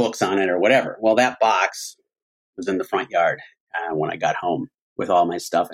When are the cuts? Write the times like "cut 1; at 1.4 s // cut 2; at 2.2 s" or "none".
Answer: cut 1; at 4.8 s